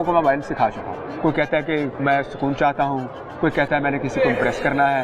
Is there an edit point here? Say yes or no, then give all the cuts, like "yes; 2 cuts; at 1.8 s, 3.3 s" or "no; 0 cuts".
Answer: yes; 2 cuts; at 1.0 s, 1.9 s